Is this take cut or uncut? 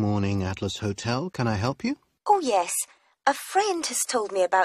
cut